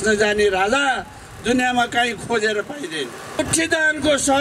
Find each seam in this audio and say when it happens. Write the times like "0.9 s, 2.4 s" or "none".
3.4 s